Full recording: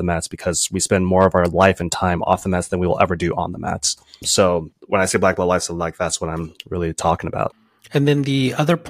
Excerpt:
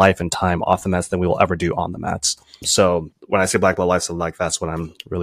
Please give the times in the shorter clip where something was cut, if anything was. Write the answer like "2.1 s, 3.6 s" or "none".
none